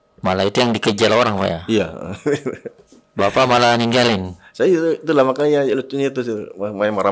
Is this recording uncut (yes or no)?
yes